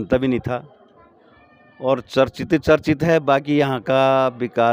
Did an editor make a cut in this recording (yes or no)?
no